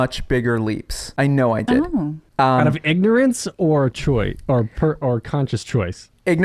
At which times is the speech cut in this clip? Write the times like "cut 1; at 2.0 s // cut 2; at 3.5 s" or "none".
cut 1; at 0.9 s // cut 2; at 2.2 s